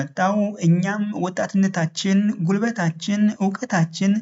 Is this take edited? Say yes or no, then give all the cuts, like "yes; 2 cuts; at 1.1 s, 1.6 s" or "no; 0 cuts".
no; 0 cuts